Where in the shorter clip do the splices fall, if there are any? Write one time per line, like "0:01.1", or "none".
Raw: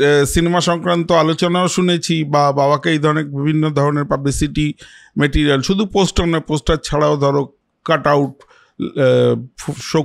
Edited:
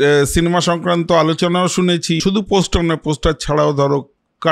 0:02.2

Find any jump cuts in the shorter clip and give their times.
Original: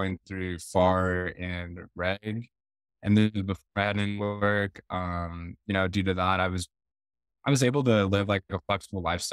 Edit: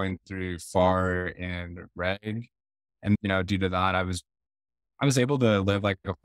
0:03.2

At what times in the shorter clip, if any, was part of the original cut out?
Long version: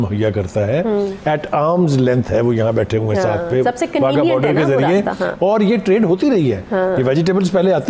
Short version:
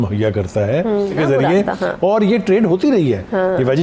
0:01.2

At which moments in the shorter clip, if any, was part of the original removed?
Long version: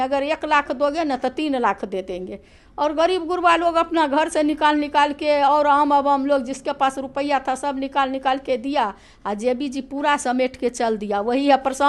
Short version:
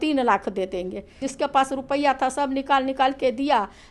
0:01.3

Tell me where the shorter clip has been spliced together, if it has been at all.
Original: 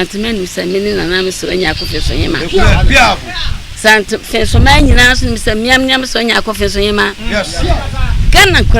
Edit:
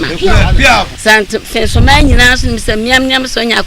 0:00.9

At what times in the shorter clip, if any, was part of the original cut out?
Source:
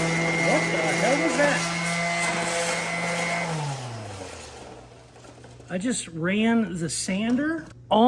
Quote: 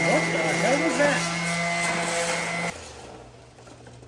0:02.7

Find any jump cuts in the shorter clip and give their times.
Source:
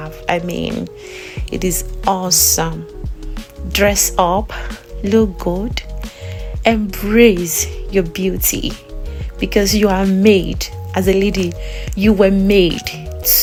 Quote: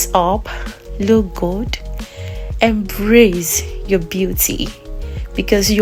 none

